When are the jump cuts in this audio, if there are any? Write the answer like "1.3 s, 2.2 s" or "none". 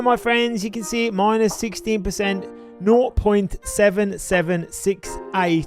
none